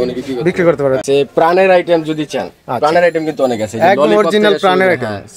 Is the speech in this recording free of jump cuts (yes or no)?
no